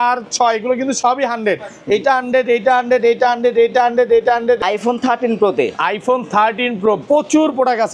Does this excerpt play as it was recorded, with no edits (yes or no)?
no